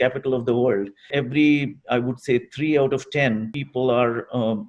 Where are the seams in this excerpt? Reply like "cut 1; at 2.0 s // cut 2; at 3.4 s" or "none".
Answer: cut 1; at 1.1 s // cut 2; at 3.6 s